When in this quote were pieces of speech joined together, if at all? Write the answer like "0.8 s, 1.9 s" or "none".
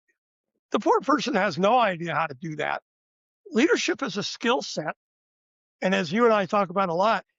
none

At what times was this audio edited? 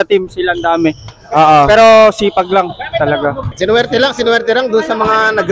3.5 s

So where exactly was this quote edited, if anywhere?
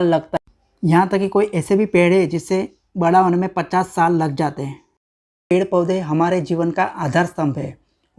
5.5 s

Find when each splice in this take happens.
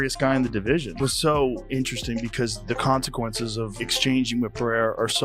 0.9 s, 3.8 s

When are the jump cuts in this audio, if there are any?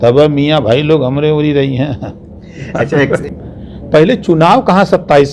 3.2 s

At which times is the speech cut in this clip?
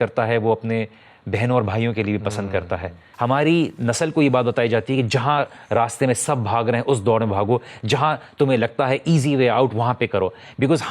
3.0 s

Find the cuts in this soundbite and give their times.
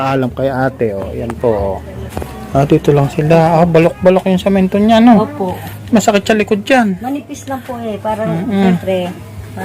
2.2 s

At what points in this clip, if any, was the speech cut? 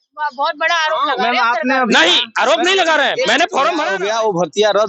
4.0 s

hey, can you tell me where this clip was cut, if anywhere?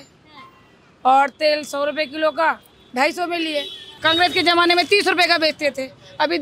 3.8 s

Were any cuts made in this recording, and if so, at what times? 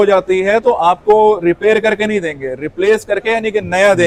none

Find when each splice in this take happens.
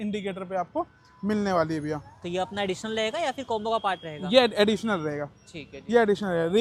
none

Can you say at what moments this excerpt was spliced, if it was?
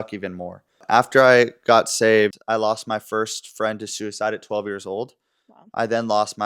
0.8 s, 2.4 s

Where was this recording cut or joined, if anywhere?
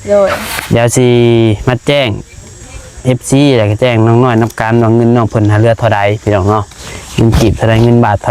none

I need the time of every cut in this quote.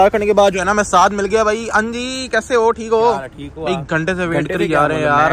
none

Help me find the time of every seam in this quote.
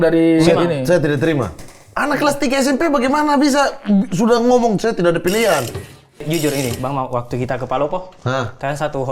6.0 s

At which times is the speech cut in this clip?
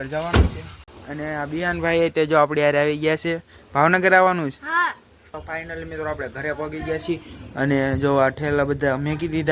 1.0 s, 5.4 s

